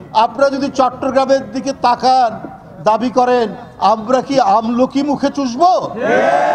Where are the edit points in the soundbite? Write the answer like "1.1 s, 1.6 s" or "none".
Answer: none